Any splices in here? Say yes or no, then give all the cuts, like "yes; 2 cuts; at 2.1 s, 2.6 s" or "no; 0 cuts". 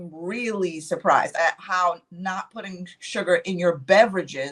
yes; 1 cut; at 1.3 s